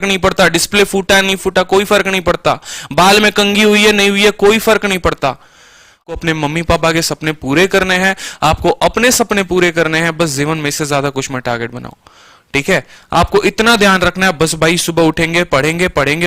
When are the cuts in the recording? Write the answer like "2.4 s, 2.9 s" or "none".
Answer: 6.1 s